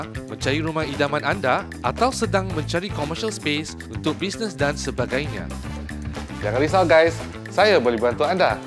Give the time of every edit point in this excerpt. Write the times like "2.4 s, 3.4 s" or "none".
none